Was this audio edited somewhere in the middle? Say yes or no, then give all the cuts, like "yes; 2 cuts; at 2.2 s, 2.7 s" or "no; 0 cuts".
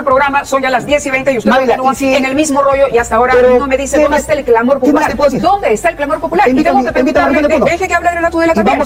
no; 0 cuts